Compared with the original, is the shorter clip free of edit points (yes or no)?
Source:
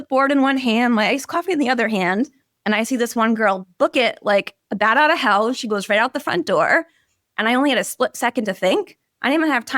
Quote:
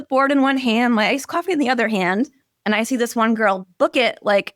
yes